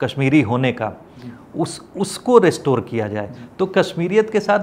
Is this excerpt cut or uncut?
uncut